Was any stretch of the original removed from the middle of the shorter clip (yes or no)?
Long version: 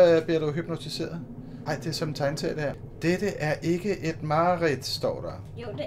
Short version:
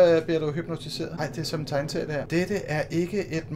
yes